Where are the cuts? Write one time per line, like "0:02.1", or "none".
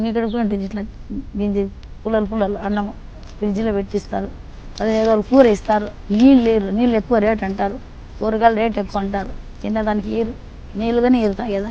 none